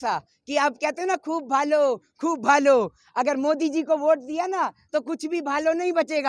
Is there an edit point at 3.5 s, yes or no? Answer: no